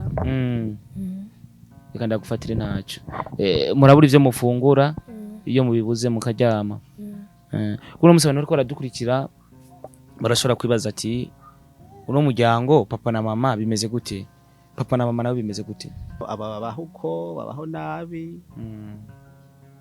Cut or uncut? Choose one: cut